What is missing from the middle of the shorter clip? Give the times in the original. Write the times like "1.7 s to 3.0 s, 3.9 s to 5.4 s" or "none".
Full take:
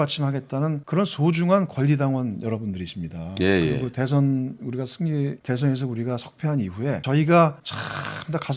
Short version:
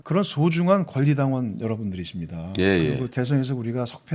3.9 s to 5.4 s